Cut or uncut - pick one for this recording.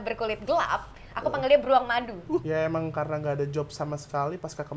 cut